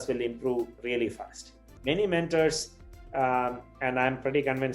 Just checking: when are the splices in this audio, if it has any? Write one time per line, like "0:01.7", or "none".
0:01.7